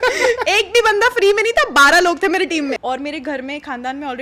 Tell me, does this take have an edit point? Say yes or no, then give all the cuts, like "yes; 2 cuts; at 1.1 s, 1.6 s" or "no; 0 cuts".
yes; 1 cut; at 2.8 s